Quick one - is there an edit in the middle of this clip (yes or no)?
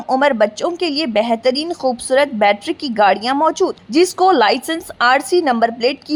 no